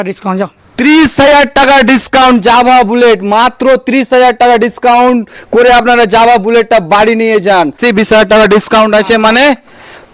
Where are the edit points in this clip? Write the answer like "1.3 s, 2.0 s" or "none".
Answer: 7.8 s